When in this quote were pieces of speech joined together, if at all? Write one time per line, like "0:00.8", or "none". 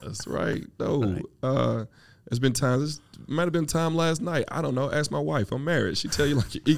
none